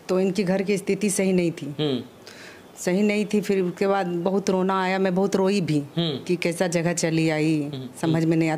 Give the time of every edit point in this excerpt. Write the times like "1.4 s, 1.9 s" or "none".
none